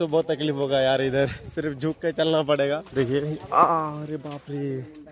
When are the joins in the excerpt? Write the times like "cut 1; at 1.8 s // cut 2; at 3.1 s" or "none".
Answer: cut 1; at 2.9 s